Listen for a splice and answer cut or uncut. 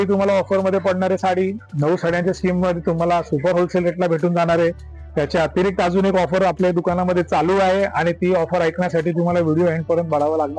uncut